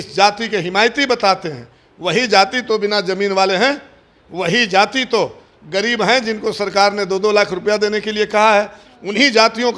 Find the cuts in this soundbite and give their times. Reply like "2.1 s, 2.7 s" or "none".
none